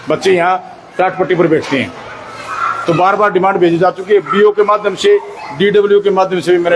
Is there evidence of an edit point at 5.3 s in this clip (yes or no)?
no